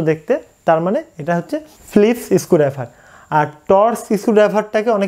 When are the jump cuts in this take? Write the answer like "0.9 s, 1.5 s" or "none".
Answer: 1.8 s